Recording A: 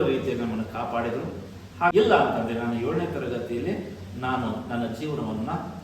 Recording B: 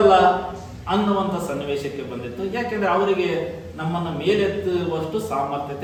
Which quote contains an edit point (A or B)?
A